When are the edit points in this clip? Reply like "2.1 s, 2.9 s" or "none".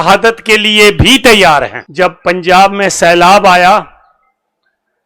1.8 s